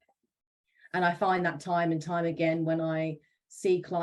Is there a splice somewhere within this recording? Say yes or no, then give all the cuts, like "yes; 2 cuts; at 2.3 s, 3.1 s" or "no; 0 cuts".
no; 0 cuts